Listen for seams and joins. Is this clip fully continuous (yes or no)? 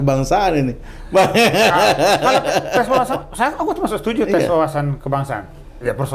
yes